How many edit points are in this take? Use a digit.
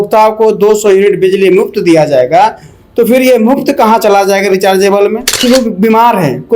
1